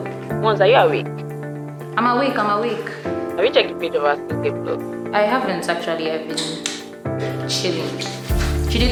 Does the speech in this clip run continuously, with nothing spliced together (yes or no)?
yes